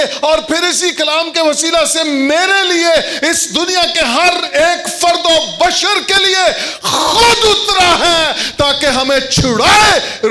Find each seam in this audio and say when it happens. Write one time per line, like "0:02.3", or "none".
none